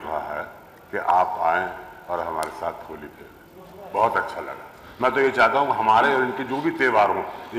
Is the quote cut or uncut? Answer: uncut